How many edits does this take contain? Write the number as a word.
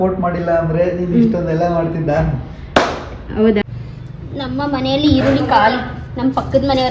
one